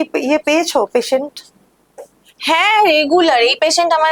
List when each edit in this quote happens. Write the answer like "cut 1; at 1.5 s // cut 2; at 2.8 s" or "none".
none